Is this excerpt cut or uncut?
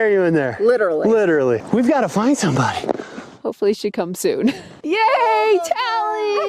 cut